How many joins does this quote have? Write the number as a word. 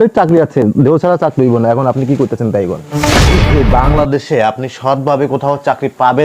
one